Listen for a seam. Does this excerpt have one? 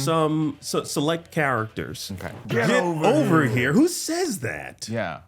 yes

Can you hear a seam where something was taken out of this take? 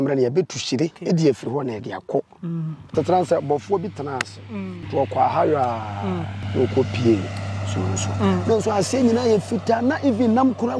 yes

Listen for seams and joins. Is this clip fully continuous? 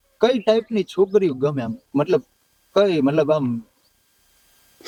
yes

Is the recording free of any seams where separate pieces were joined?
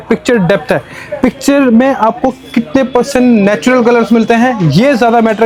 yes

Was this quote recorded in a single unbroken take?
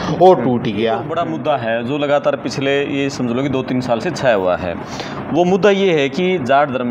no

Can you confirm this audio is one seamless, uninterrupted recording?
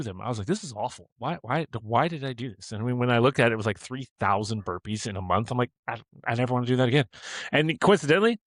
yes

